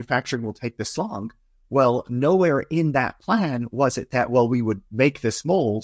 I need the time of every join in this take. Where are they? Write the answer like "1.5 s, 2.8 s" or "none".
none